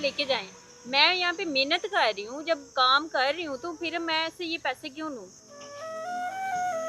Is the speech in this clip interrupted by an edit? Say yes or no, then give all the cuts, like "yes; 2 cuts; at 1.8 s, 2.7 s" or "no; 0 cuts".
no; 0 cuts